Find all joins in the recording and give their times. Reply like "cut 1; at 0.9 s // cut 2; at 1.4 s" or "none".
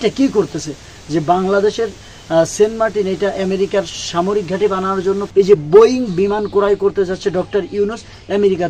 cut 1; at 5.2 s